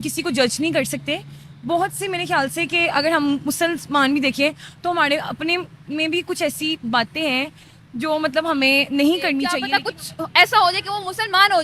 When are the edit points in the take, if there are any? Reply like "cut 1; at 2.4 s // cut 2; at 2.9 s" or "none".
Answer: cut 1; at 9.6 s